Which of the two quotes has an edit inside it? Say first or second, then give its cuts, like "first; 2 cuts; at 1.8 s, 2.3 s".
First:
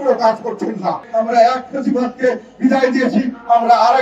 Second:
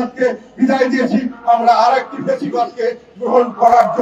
first; 1 cut; at 1.0 s